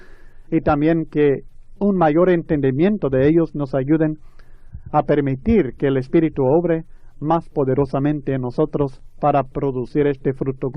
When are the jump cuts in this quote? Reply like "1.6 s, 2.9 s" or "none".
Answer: 9.0 s